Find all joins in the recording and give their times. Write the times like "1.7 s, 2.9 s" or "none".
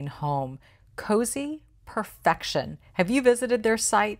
none

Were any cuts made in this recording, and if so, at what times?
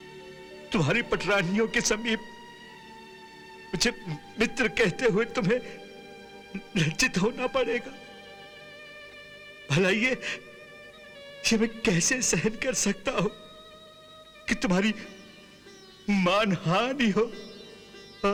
none

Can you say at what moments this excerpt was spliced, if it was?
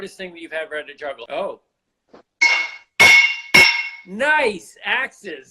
1.2 s

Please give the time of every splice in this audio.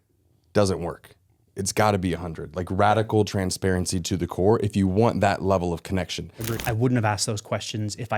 6.4 s

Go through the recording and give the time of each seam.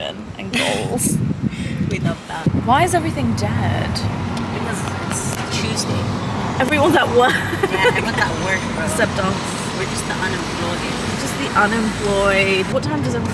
none

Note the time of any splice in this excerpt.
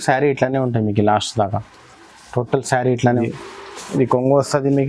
3.1 s

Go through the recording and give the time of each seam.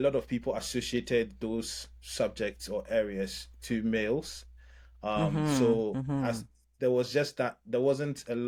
none

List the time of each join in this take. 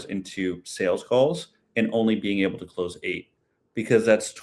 none

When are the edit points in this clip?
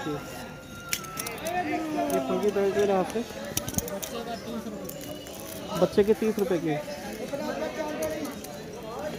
none

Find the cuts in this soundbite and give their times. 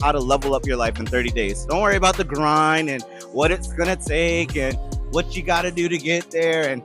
1.6 s

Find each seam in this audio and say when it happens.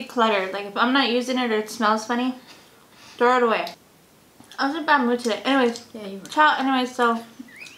3.7 s

